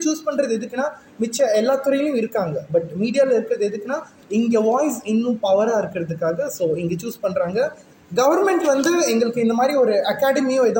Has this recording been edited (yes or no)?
yes